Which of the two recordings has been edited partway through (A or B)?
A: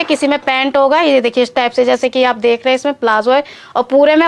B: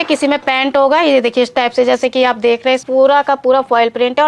B